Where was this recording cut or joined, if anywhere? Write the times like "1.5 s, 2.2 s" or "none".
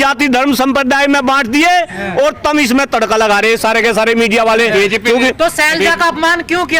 none